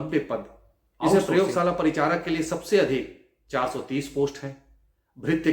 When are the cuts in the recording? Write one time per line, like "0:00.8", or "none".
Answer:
0:01.1